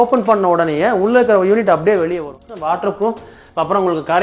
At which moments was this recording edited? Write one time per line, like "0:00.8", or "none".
0:02.3